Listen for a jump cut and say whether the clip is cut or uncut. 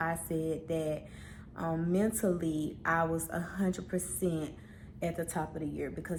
uncut